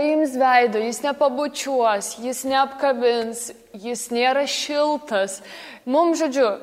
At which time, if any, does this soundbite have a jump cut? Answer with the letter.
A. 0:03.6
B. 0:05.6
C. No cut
B